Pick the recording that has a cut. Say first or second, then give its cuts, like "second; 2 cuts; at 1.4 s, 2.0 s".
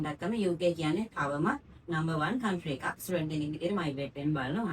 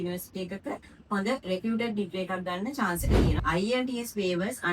second; 1 cut; at 3.4 s